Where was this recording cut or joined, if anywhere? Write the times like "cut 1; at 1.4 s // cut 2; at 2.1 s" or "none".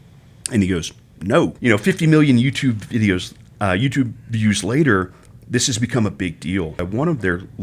cut 1; at 1.6 s // cut 2; at 6.8 s